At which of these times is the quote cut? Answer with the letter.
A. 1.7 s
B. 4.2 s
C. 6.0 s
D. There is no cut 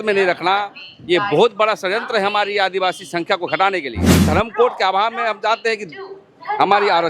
B